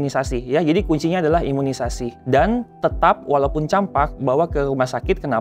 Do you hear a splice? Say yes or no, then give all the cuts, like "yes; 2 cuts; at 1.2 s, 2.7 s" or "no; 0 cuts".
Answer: yes; 1 cut; at 2.1 s